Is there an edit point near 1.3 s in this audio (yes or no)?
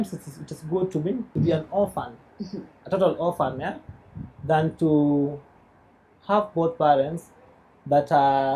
yes